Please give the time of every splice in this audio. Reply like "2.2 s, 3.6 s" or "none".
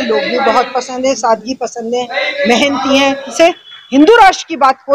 3.3 s